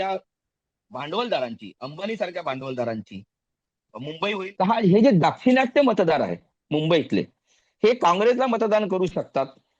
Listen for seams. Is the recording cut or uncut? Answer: cut